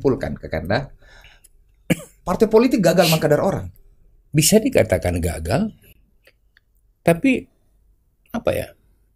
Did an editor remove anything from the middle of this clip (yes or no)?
no